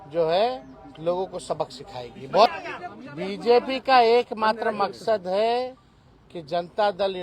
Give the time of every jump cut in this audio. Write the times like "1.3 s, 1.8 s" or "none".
2.5 s